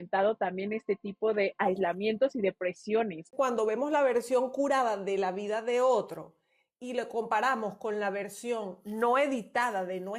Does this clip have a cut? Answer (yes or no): yes